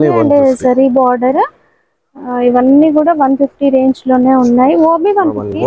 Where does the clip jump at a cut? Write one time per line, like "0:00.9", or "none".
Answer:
none

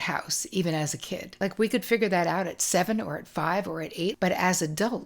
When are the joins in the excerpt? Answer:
0:01.3
0:04.1

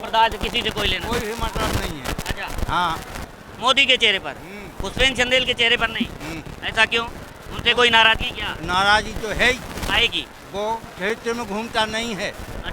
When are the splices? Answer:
0:03.3

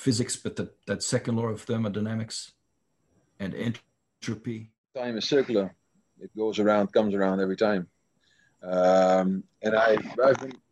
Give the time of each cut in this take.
0:05.0

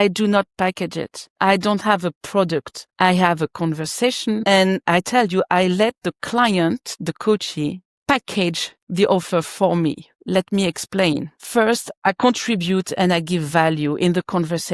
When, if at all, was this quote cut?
0:11.3

